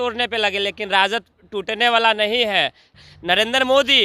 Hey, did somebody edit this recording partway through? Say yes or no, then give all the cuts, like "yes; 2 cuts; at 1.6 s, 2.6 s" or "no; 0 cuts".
yes; 1 cut; at 3.1 s